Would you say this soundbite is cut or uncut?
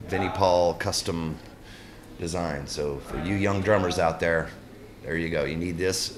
uncut